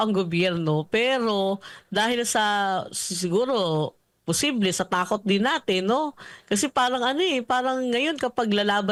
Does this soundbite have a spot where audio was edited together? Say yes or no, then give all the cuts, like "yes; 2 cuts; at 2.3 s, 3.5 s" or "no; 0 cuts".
no; 0 cuts